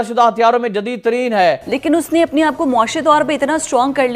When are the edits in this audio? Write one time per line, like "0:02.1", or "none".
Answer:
0:01.7